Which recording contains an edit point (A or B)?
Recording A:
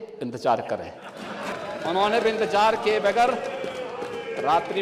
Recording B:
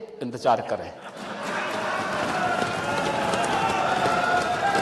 A